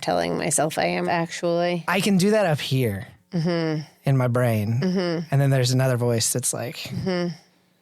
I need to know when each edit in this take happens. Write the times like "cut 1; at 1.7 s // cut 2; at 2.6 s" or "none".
cut 1; at 1.0 s // cut 2; at 1.8 s